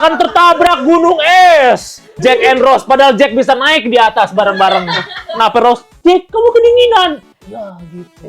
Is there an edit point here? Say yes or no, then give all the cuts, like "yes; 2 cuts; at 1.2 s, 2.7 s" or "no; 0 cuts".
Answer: yes; 1 cut; at 2.1 s